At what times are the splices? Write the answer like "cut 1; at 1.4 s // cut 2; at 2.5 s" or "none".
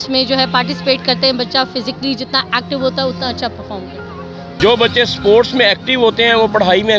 cut 1; at 4.4 s